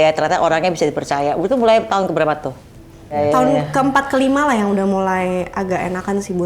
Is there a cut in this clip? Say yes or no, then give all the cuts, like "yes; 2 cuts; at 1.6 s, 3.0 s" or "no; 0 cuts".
yes; 1 cut; at 3.2 s